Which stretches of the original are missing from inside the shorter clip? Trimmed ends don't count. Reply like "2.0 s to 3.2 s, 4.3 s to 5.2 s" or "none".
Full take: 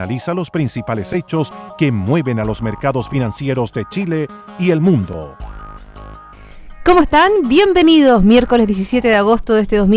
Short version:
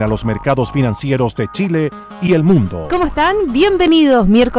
5.2 s to 6.8 s